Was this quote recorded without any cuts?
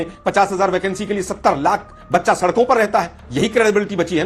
yes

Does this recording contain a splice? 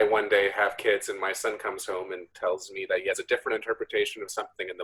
no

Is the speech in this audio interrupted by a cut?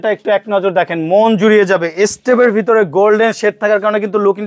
no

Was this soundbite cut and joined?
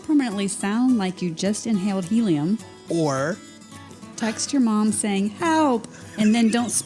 yes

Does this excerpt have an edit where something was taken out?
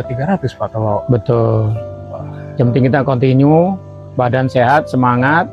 no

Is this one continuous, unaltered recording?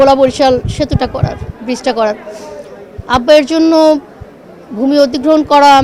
yes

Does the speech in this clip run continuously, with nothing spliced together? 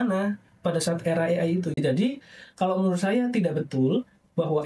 no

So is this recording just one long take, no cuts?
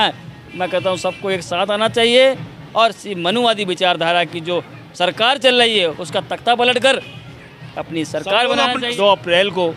no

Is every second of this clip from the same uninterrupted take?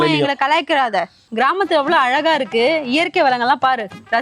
no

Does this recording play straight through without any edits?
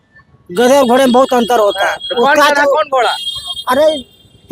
yes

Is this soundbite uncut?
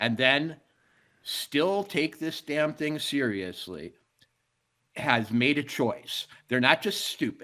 yes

